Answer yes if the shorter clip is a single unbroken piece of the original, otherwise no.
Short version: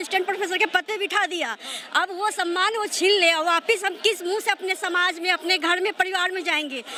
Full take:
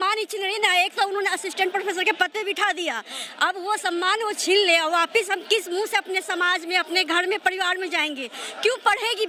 yes